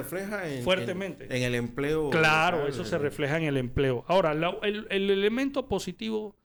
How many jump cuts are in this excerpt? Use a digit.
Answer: 0